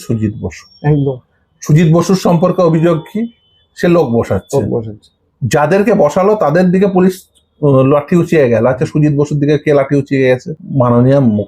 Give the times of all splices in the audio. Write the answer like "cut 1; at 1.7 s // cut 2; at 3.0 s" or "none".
cut 1; at 10.5 s